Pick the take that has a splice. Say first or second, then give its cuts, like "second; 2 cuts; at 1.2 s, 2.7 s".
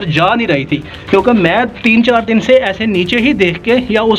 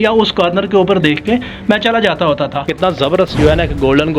second; 1 cut; at 2.7 s